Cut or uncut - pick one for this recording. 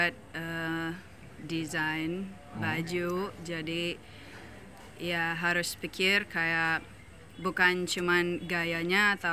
uncut